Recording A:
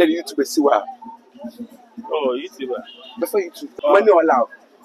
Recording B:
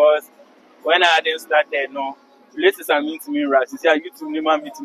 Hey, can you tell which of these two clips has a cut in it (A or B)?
A